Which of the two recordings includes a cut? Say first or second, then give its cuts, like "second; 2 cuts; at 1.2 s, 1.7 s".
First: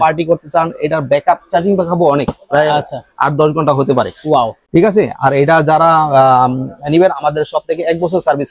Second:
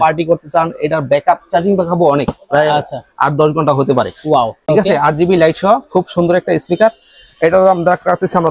second; 1 cut; at 4.6 s